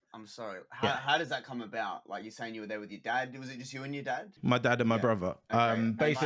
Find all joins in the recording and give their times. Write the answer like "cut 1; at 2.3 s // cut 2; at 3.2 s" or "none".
cut 1; at 4.4 s